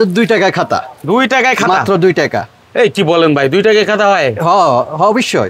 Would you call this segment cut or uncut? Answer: uncut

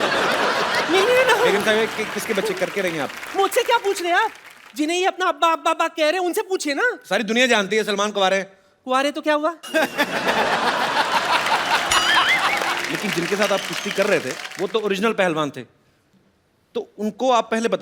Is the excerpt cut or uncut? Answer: cut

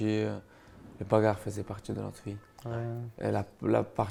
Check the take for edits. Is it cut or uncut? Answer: uncut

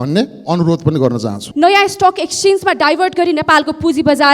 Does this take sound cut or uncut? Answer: cut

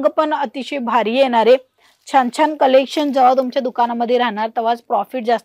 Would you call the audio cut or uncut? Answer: uncut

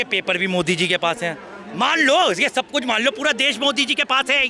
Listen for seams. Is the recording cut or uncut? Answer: uncut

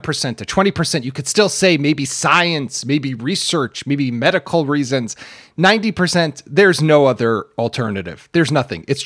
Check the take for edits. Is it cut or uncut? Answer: uncut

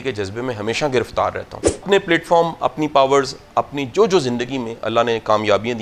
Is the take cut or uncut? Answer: cut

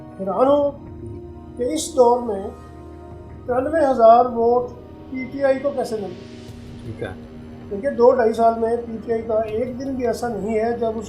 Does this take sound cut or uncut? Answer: uncut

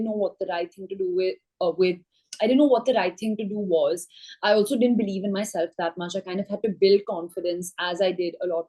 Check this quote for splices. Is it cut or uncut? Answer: uncut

